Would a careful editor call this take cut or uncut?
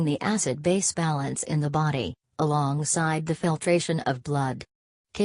cut